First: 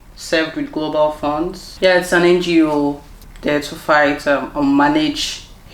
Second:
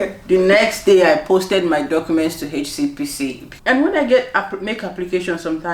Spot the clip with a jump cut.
second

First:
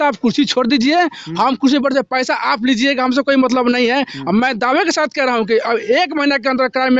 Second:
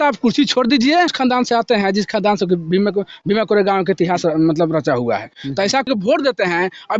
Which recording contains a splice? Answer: second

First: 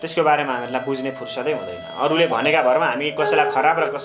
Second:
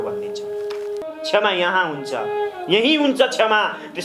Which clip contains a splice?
second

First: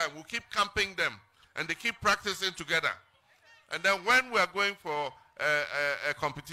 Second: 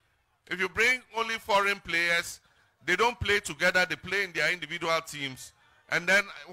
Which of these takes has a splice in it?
first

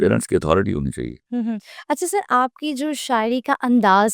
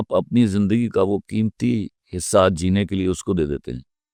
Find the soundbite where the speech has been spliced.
first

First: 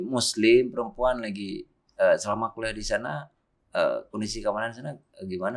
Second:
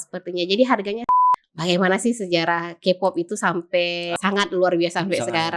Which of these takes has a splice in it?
second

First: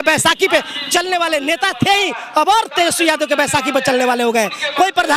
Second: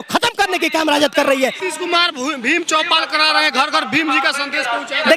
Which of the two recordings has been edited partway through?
second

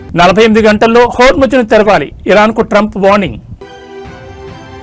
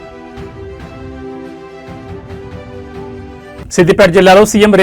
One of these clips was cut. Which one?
second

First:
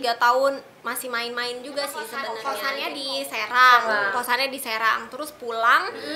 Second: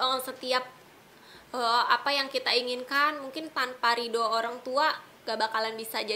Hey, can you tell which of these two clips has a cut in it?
first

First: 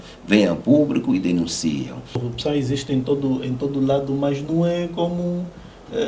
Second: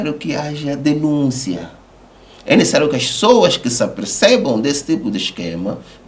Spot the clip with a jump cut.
first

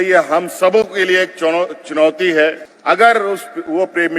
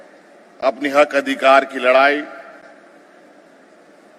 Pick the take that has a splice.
first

